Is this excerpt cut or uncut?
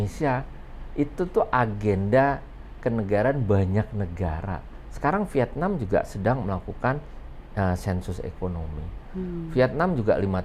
uncut